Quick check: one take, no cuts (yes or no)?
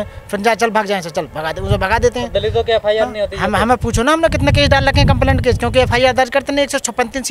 yes